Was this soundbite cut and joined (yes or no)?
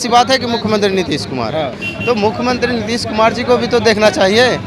no